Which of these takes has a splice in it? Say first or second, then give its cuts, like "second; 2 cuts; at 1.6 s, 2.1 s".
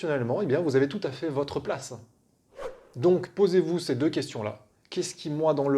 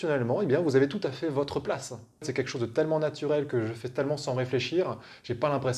second; 1 cut; at 2.3 s